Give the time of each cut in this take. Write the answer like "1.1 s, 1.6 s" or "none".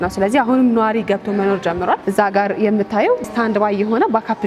2.0 s, 3.2 s